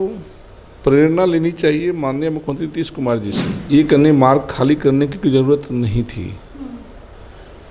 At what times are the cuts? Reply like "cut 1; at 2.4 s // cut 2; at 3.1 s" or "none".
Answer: cut 1; at 3.5 s